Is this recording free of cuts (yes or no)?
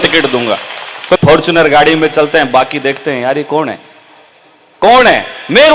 no